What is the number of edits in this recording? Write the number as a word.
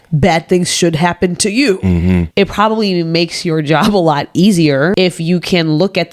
two